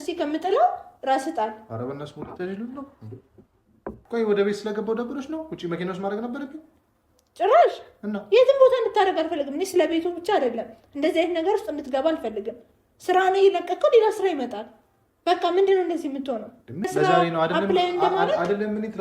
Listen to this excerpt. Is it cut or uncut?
cut